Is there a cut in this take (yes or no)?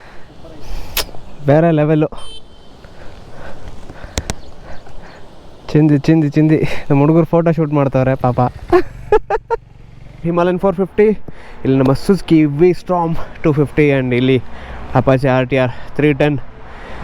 yes